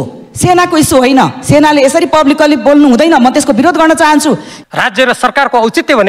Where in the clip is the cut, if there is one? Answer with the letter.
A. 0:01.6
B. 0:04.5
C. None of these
B